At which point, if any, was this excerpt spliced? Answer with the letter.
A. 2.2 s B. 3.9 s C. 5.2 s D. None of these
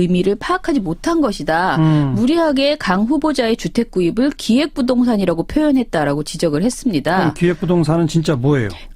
A